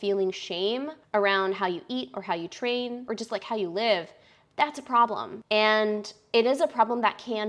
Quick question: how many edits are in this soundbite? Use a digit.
3